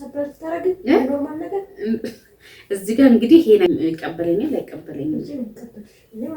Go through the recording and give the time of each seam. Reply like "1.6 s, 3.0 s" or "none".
3.7 s